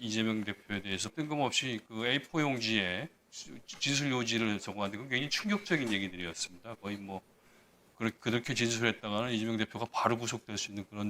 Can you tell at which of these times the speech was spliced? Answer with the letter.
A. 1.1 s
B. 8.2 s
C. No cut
A